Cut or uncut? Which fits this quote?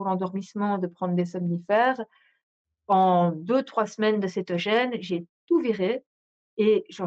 uncut